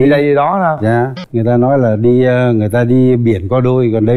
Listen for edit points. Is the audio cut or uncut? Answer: cut